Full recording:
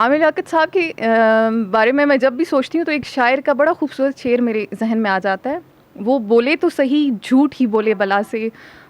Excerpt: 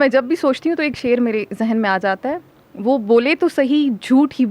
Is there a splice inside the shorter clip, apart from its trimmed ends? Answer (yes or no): yes